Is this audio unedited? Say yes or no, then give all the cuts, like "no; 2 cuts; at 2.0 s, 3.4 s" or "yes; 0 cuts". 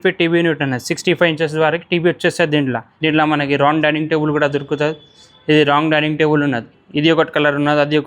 no; 2 cuts; at 2.9 s, 6.7 s